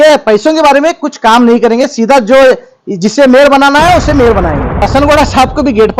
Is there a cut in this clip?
yes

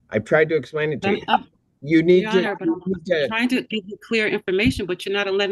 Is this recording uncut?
yes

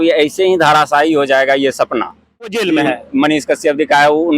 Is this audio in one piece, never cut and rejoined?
no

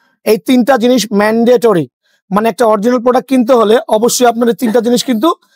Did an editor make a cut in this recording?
no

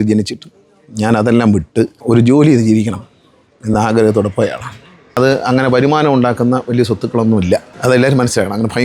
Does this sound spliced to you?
yes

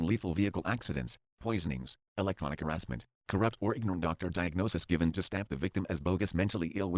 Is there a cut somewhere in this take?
yes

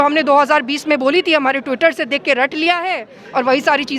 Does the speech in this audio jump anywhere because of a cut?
no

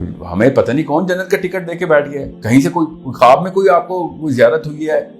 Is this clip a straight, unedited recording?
yes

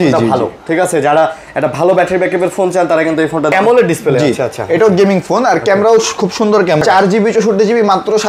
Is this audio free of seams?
no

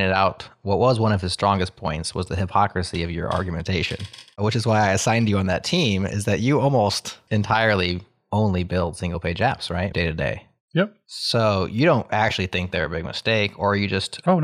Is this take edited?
yes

